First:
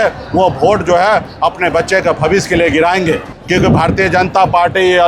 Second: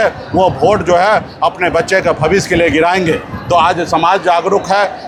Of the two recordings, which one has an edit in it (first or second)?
first